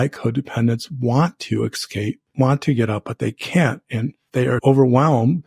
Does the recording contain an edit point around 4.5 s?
yes; 2 cuts; at 2.3 s, 4.5 s

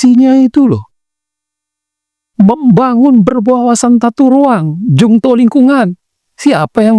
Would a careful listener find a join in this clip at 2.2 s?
no; 0 cuts

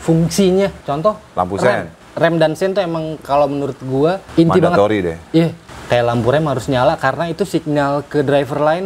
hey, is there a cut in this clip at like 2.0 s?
yes; 3 cuts; at 2.0 s, 4.2 s, 5.7 s

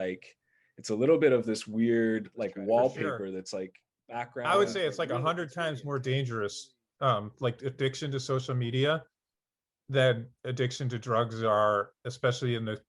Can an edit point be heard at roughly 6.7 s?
no; 1 cut; at 4.3 s

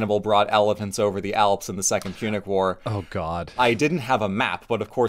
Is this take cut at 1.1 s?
no; 1 cut; at 3.5 s

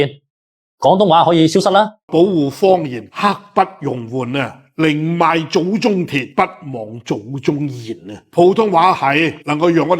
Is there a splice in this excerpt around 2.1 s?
yes; 1 cut; at 2.1 s

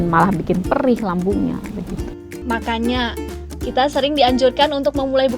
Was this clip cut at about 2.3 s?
yes; 1 cut; at 2.3 s

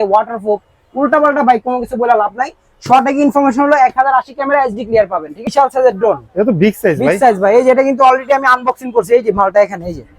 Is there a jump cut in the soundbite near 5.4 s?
yes; 1 cut; at 5.4 s

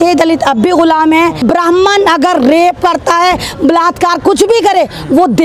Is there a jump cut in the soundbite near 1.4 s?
yes; 1 cut; at 1.4 s

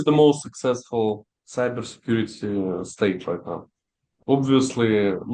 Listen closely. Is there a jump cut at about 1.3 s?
no; 0 cuts

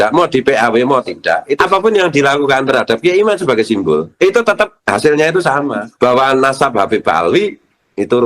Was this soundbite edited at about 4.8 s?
yes; 4 cuts; at 1.5 s, 4.1 s, 4.8 s, 5.8 s

